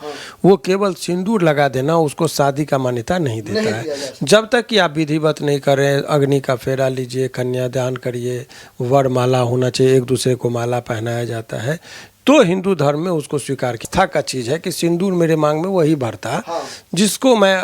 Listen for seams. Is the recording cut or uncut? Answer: cut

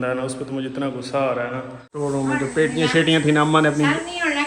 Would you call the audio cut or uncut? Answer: cut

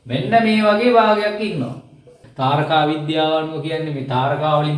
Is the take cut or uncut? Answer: cut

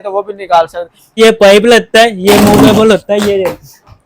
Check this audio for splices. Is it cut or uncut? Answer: cut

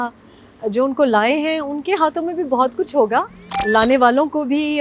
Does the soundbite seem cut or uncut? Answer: cut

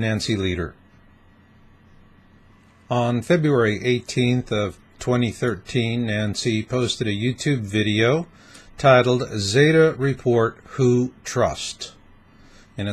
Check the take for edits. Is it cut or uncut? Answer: cut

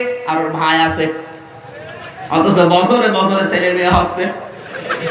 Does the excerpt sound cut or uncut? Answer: uncut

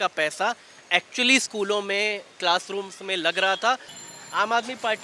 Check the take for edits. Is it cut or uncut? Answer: cut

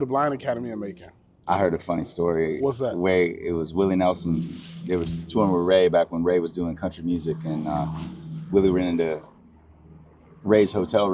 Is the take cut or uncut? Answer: cut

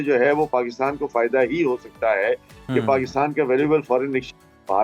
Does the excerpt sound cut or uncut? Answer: uncut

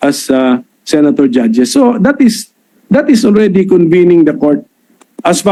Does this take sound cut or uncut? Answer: uncut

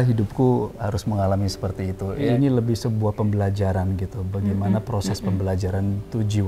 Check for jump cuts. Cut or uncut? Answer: cut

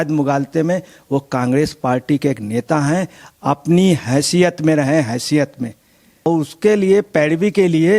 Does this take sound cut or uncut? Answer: cut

